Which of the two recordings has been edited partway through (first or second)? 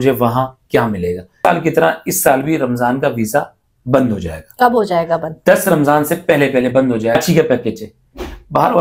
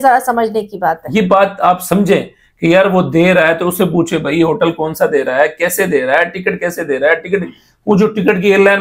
first